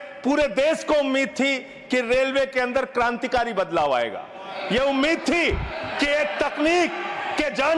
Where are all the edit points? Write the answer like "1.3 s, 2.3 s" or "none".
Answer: none